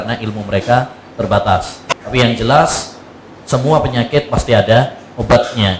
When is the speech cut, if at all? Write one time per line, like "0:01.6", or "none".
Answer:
0:01.8